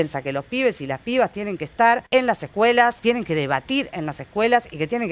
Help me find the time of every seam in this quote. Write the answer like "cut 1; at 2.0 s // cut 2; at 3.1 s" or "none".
cut 1; at 2.0 s // cut 2; at 3.0 s